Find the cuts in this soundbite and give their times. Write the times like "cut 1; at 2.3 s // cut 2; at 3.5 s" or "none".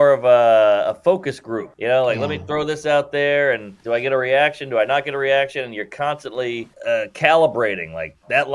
none